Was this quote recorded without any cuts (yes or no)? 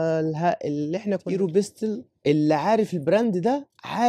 no